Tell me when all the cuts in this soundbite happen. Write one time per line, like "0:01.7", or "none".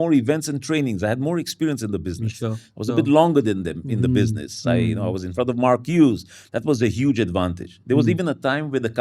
none